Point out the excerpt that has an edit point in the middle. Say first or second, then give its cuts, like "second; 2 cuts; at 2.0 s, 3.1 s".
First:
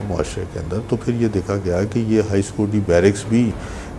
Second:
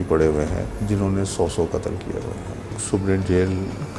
second; 1 cut; at 2.8 s